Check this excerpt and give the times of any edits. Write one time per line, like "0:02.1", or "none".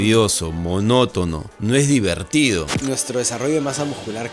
0:01.5
0:02.7